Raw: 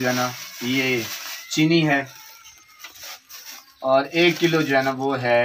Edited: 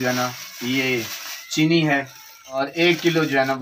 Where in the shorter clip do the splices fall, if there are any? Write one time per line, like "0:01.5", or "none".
0:02.6